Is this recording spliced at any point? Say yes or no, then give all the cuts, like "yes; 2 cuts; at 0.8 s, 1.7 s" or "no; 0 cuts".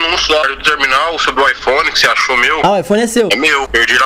no; 0 cuts